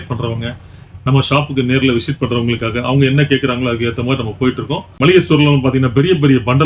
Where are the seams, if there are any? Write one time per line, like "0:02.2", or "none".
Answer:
0:04.8